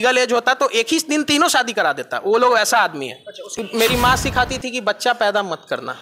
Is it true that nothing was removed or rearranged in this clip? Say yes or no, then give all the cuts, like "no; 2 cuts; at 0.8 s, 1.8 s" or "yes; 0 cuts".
no; 1 cut; at 3.4 s